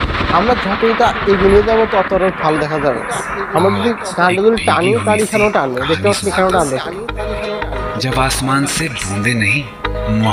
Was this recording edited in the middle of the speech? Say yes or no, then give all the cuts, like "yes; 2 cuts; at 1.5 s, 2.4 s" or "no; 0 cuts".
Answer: no; 0 cuts